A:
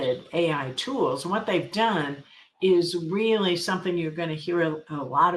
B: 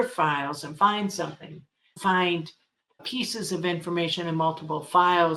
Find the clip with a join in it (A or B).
B